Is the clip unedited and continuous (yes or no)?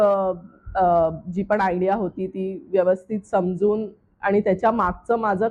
yes